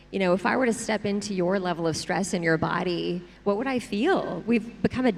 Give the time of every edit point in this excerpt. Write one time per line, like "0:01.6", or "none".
none